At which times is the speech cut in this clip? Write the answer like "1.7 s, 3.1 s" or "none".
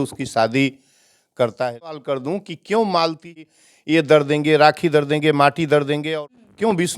2.0 s, 3.4 s, 6.1 s

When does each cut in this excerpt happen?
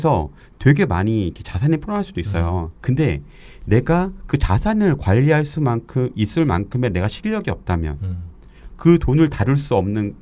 none

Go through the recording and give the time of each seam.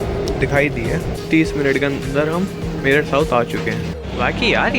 1.2 s, 4.0 s

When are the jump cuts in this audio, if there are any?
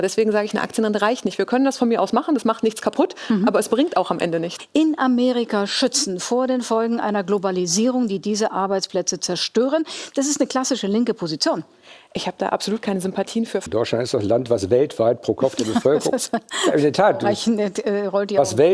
4.5 s, 13.6 s

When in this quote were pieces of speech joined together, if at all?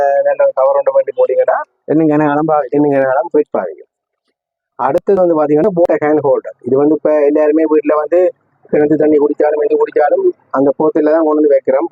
none

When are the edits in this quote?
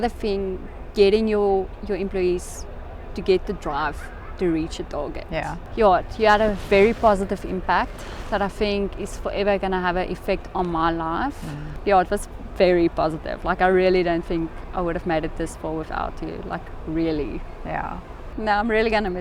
5.6 s, 11.7 s, 18.2 s

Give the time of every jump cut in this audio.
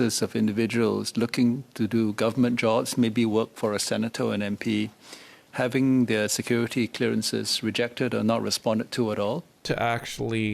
9.6 s

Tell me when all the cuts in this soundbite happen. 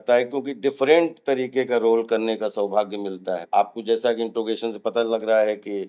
3.4 s

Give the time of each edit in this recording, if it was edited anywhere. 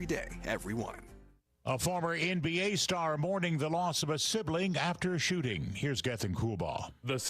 1.3 s

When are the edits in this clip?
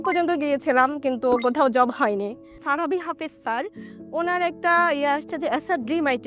none

